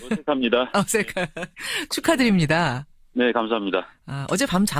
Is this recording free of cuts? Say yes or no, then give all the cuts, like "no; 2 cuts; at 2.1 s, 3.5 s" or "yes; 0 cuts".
no; 1 cut; at 1.0 s